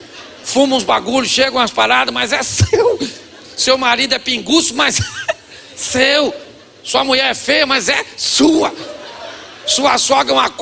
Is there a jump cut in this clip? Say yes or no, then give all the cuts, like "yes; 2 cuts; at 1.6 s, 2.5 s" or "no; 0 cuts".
no; 0 cuts